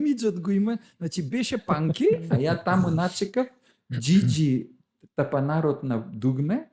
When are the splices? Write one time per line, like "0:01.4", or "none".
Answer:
0:02.3